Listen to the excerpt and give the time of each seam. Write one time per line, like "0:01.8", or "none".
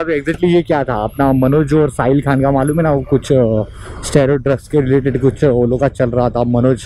none